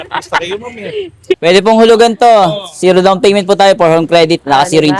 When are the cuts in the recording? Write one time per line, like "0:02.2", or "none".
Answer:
0:01.4